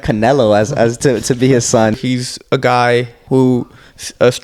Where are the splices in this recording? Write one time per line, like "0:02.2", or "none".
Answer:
0:01.9
0:03.2